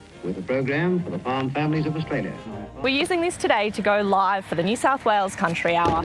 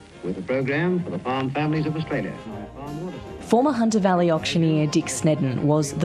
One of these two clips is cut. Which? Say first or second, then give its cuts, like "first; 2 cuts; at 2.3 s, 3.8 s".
first; 1 cut; at 2.8 s